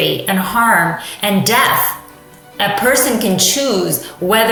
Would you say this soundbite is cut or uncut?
uncut